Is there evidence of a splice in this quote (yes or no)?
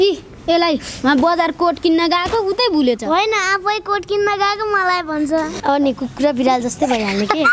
yes